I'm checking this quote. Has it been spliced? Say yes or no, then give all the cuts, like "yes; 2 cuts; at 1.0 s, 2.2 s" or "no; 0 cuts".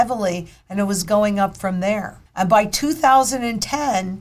yes; 1 cut; at 2.2 s